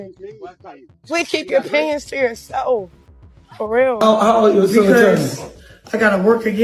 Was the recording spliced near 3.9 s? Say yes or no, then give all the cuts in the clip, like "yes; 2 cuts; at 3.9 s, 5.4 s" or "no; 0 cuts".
yes; 1 cut; at 3.9 s